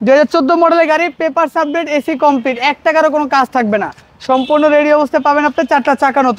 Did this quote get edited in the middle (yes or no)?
no